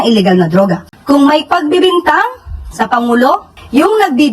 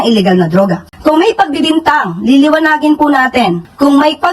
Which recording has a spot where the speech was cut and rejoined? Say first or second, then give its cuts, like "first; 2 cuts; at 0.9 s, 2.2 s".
first; 1 cut; at 0.9 s